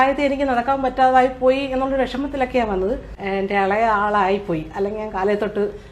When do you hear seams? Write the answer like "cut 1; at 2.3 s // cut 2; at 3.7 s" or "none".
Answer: cut 1; at 3.1 s